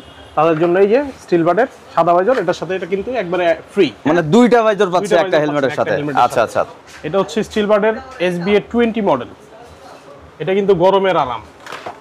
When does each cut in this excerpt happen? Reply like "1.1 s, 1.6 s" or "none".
none